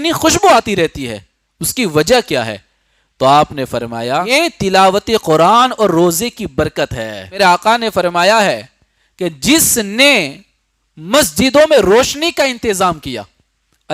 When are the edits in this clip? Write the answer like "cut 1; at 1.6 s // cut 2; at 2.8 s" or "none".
cut 1; at 4.3 s // cut 2; at 7.4 s